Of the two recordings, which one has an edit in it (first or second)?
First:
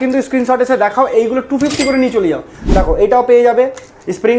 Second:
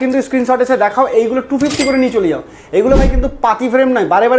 first